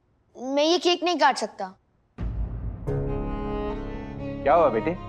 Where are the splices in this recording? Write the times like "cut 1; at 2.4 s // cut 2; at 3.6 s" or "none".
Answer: none